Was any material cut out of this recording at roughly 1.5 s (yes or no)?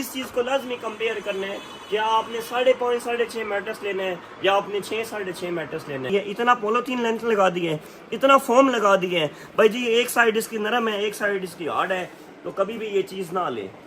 no